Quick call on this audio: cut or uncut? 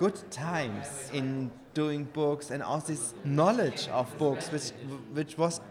cut